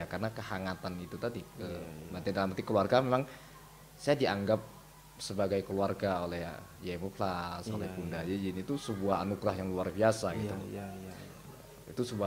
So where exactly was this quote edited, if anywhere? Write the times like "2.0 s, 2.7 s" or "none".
none